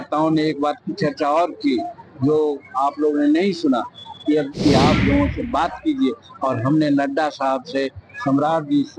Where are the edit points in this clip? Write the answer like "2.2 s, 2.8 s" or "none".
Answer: 4.5 s